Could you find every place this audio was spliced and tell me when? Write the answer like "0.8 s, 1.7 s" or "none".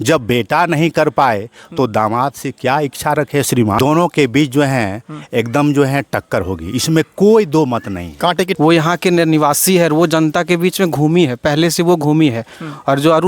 3.8 s, 8.5 s